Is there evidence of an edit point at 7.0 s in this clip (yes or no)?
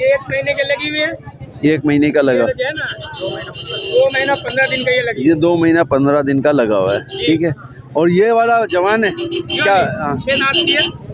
no